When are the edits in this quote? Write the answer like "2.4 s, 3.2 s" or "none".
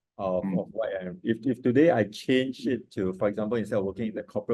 none